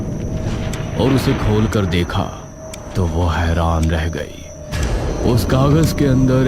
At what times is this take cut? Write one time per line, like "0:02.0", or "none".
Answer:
0:00.9